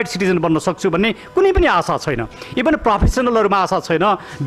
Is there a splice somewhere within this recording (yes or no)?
no